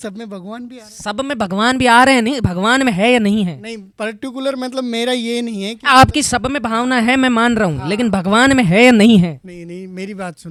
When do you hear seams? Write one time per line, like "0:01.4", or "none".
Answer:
none